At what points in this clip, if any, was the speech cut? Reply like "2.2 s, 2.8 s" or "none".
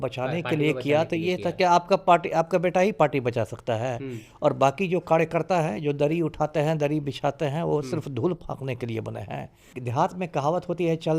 9.7 s